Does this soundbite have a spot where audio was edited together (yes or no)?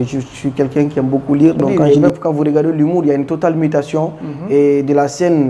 yes